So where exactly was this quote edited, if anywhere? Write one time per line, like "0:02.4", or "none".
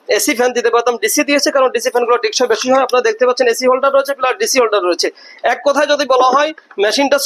none